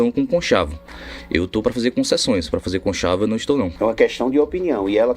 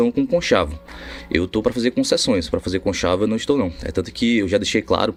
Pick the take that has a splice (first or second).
first